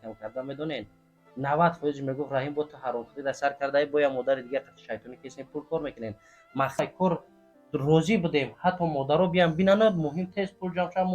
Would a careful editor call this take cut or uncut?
cut